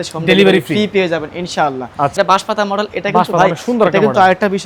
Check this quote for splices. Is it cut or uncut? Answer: cut